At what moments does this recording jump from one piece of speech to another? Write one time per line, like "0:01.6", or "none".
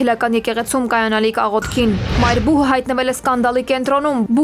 0:02.1